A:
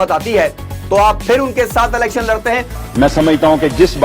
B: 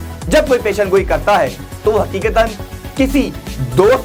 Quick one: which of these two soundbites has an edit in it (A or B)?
A